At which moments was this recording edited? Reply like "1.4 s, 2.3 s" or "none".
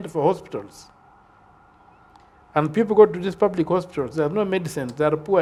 none